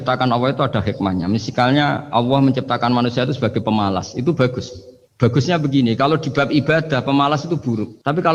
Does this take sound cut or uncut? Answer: uncut